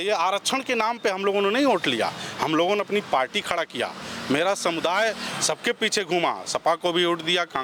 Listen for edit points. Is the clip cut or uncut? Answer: uncut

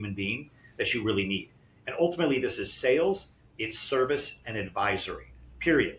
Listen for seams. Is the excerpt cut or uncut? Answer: uncut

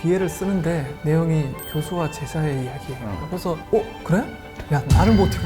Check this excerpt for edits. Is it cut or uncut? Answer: uncut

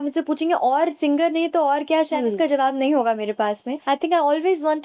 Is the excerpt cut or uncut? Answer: cut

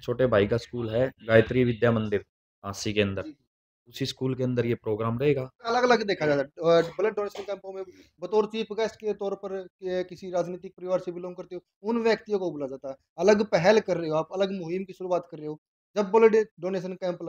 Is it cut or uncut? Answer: cut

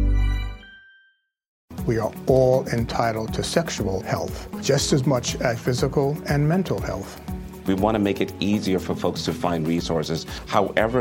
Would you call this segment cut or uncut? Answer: cut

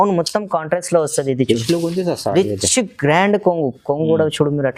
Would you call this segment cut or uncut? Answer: uncut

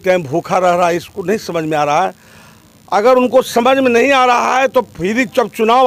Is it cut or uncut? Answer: uncut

